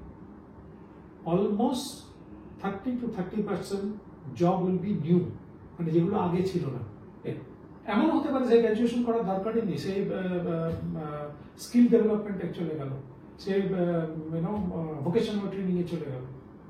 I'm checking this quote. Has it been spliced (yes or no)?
yes